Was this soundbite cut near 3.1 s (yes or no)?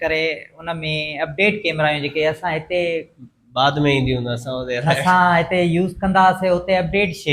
no